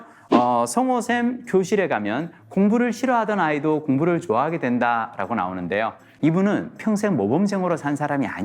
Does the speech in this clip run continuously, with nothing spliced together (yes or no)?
no